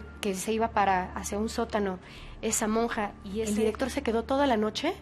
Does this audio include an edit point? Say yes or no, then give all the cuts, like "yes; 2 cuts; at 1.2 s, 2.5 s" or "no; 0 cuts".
yes; 1 cut; at 3.4 s